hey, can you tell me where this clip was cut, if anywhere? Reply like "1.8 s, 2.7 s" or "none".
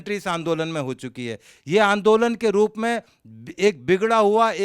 1.5 s